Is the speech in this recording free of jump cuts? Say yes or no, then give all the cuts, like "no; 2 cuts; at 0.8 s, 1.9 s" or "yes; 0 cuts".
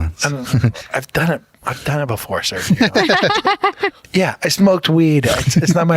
no; 1 cut; at 4.0 s